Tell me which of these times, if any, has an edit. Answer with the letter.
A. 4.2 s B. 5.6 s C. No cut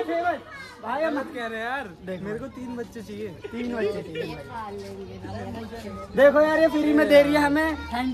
C